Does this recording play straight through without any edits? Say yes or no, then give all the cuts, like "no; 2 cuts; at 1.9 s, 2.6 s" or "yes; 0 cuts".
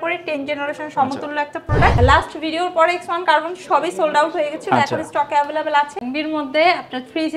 no; 2 cuts; at 2.0 s, 6.0 s